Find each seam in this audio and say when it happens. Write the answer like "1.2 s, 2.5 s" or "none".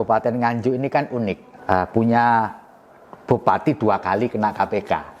1.5 s